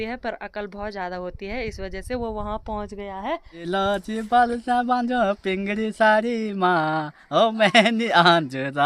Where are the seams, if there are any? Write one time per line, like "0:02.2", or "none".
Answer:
0:03.4